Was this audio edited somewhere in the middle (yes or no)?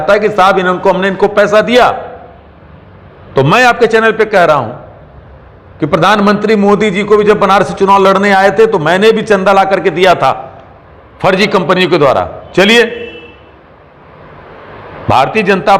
no